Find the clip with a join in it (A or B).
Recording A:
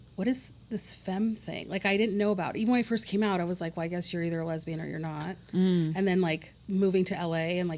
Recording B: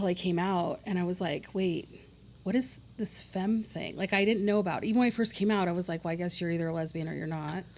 A